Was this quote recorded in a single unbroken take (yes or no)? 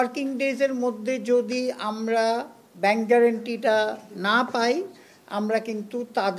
yes